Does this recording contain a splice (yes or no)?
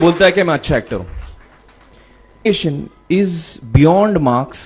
yes